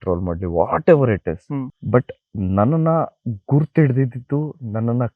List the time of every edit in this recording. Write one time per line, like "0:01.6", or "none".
none

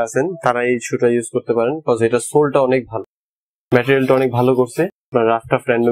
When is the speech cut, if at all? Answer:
none

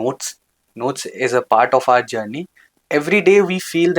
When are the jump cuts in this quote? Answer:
0:02.7

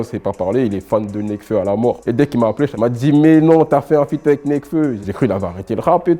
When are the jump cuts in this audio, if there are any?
0:02.7
0:05.0

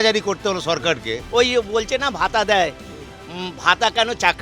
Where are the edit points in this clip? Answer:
0:01.1

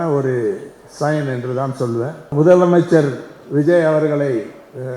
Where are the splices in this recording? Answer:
0:02.3

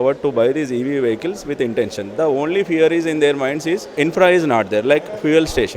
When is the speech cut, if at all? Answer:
0:03.9

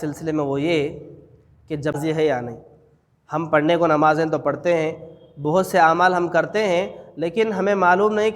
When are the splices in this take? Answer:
0:02.0

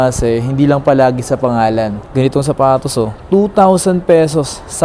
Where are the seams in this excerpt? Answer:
0:02.0

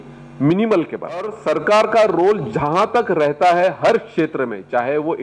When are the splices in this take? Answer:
0:01.4

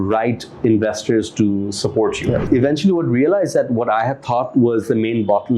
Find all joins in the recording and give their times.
0:02.4

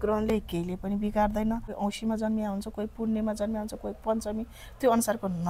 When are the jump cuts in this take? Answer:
0:01.7

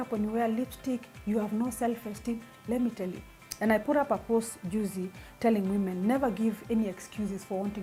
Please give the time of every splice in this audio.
none

